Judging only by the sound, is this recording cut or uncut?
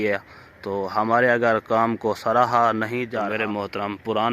cut